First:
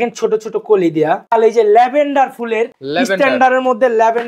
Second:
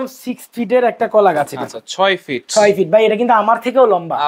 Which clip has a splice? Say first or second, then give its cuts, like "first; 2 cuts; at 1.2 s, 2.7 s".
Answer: first; 2 cuts; at 1.2 s, 2.8 s